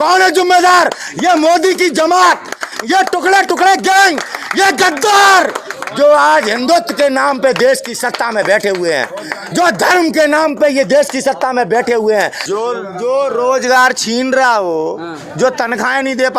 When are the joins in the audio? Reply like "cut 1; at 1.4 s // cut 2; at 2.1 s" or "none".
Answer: cut 1; at 12.4 s

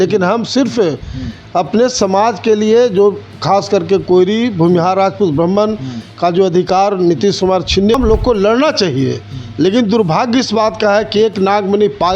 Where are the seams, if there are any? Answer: cut 1; at 8.0 s

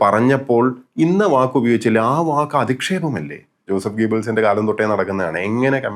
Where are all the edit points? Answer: cut 1; at 3.7 s

